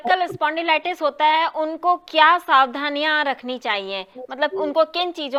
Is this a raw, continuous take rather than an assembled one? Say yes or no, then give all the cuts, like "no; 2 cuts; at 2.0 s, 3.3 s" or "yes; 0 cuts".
yes; 0 cuts